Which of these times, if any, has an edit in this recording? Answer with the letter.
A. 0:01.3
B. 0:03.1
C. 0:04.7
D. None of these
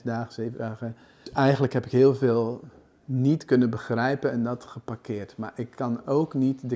A